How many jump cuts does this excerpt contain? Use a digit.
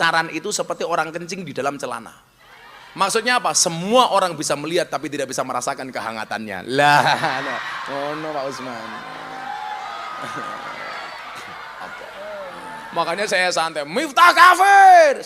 1